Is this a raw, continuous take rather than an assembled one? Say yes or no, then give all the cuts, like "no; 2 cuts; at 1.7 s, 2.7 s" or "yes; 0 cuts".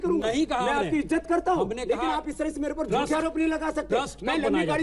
yes; 0 cuts